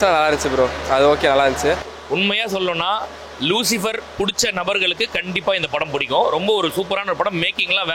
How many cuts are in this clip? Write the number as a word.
one